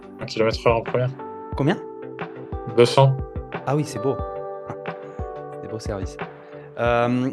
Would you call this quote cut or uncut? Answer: uncut